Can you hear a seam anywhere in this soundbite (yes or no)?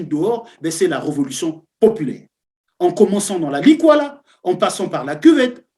no